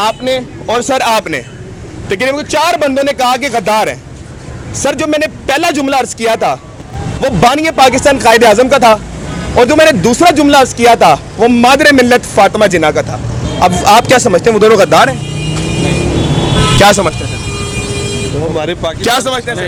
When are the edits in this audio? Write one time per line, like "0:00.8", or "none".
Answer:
none